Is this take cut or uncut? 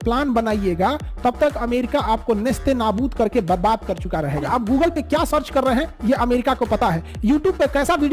cut